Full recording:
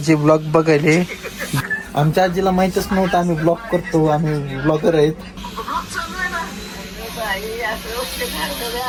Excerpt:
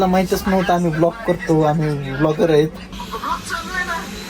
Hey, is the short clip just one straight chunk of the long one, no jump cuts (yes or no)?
yes